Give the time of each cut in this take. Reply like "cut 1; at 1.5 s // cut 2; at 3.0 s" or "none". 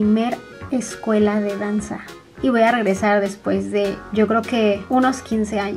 none

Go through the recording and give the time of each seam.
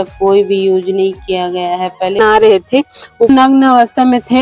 cut 1; at 2.2 s

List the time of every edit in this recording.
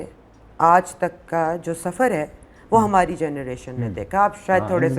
none

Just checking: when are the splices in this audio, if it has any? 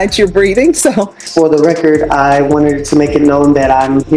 cut 1; at 1.2 s

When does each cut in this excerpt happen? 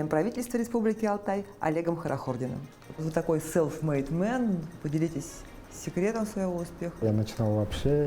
cut 1; at 2.9 s // cut 2; at 7.0 s

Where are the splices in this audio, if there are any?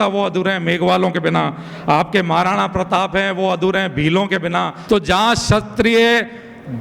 cut 1; at 4.8 s

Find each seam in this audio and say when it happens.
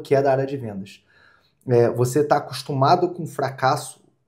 none

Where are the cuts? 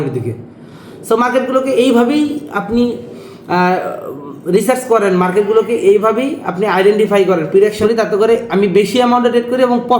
cut 1; at 7.8 s

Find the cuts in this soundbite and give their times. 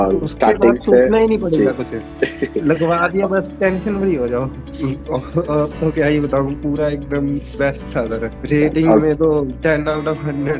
cut 1; at 4.6 s // cut 2; at 8.4 s // cut 3; at 9.5 s

